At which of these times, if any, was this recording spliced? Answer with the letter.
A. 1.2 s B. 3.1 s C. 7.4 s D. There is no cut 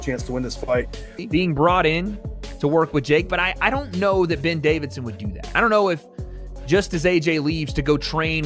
A